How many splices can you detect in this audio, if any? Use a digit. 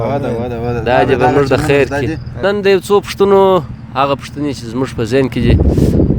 1